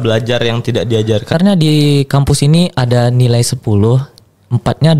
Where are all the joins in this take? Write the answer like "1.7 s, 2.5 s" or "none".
1.3 s